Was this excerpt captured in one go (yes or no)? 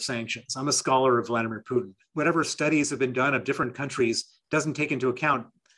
no